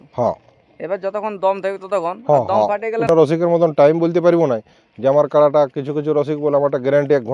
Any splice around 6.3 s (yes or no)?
no